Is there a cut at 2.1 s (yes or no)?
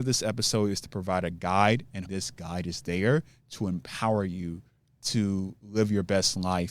yes